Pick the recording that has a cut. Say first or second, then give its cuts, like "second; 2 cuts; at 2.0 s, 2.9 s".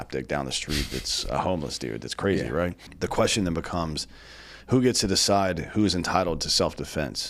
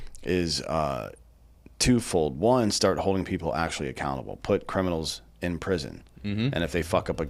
first; 1 cut; at 2.8 s